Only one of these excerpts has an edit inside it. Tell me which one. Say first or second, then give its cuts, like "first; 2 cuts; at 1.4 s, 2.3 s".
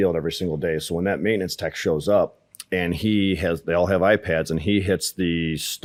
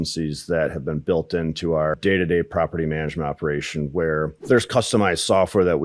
second; 2 cuts; at 2.0 s, 4.4 s